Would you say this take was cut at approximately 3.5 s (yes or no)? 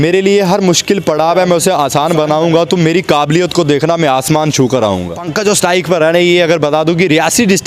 no